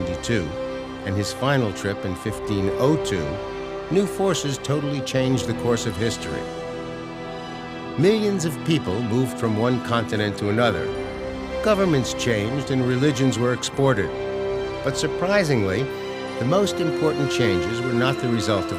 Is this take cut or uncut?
uncut